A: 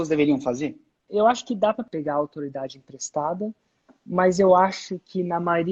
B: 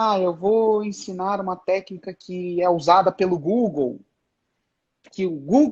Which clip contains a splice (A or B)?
A